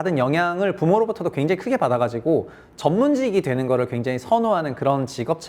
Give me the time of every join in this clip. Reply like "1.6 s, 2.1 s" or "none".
none

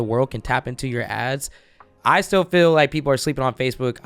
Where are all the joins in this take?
1.9 s

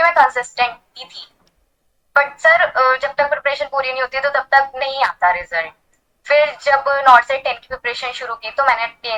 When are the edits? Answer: none

